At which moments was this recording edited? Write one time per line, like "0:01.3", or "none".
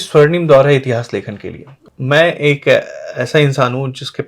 0:01.9